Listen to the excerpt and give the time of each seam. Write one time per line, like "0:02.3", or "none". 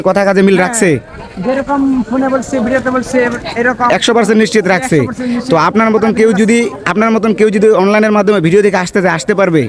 none